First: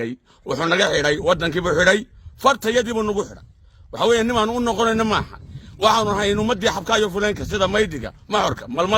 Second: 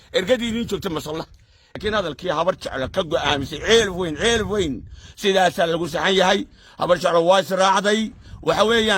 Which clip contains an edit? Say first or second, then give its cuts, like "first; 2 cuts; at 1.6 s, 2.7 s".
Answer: second; 1 cut; at 1.8 s